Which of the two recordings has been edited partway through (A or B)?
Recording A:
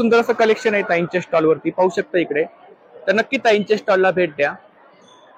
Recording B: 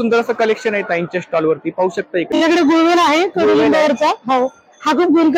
B